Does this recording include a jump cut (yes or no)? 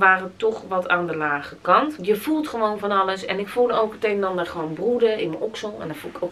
yes